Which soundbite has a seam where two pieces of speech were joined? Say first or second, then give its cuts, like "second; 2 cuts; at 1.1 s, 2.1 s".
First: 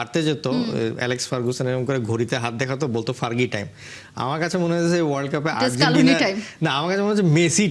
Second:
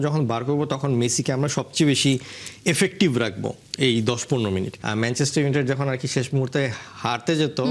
second; 1 cut; at 4.8 s